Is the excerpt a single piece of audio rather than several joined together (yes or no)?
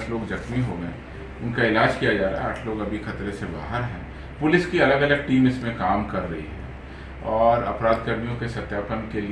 yes